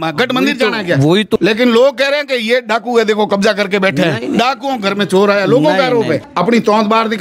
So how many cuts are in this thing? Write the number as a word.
two